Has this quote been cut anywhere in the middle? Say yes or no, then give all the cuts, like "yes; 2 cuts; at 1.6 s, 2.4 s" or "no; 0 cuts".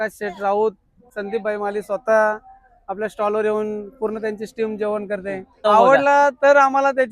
yes; 2 cuts; at 1.0 s, 5.6 s